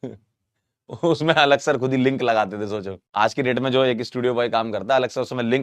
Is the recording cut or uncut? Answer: cut